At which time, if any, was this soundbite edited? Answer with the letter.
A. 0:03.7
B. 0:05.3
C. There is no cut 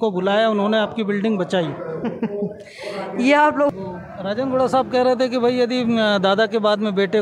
A